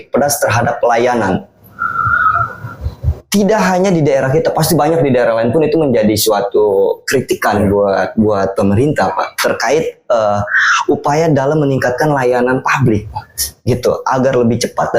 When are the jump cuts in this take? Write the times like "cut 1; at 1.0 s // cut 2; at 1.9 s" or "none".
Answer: none